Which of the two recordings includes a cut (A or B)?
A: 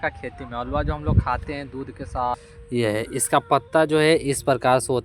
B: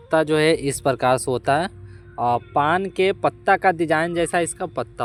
A